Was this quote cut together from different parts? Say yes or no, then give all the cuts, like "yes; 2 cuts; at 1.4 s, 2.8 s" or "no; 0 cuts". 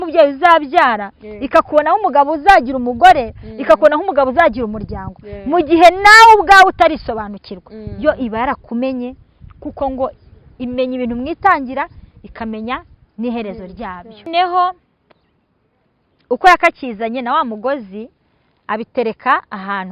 yes; 1 cut; at 14.3 s